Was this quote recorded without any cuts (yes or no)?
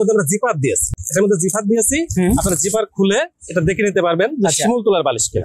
no